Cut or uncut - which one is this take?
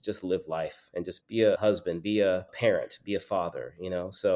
cut